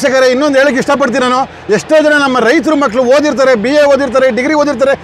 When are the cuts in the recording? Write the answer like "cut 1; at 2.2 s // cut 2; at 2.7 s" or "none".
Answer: none